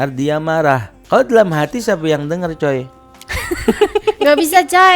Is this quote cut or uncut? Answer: cut